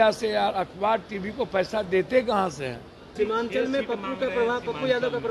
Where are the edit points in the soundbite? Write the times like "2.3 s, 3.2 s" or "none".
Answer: 3.1 s